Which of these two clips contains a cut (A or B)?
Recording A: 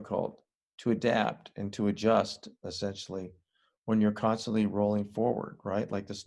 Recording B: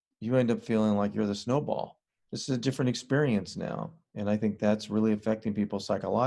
B